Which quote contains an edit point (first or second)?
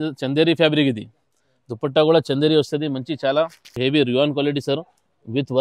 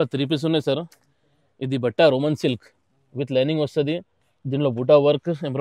first